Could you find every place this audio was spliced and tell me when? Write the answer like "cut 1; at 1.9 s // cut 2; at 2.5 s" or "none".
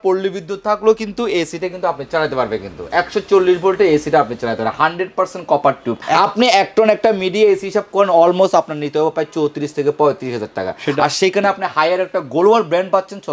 cut 1; at 6.0 s